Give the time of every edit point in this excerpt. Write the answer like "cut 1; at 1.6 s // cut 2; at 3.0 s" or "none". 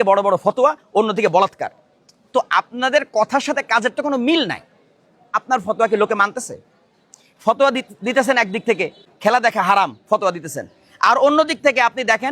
cut 1; at 5.3 s // cut 2; at 9.1 s